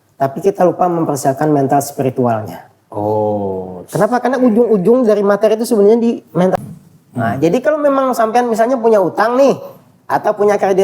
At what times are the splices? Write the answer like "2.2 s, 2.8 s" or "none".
6.6 s

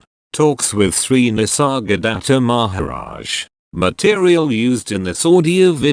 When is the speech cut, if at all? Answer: 2.7 s

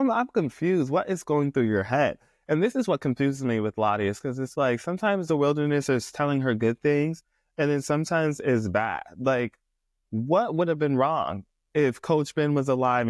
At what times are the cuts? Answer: none

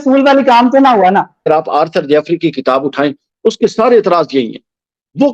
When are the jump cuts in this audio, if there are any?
1.5 s

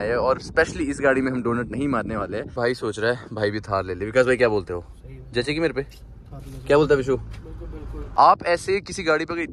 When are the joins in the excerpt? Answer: 2.5 s, 8.0 s

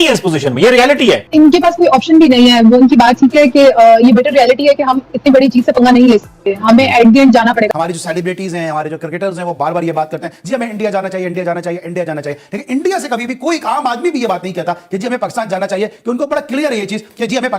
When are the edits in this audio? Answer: 1.2 s, 7.7 s

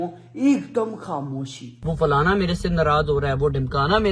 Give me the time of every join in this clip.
1.8 s

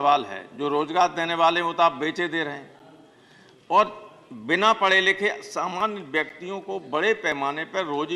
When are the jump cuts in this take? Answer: none

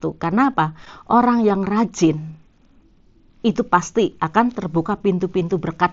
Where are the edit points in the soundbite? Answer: none

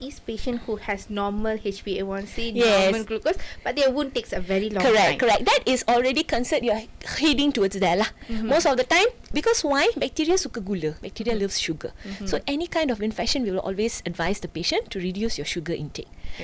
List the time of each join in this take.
none

